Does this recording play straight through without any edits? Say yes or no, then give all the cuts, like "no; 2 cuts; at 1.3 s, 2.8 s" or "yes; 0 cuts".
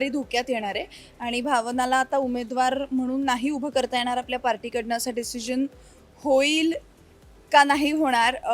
yes; 0 cuts